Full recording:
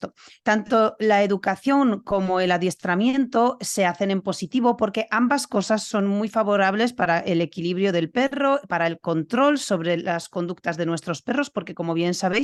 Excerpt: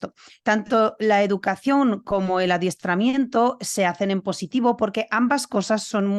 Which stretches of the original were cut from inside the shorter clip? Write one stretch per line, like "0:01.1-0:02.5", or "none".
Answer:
none